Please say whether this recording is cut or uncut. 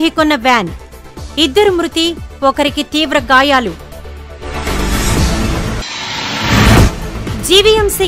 uncut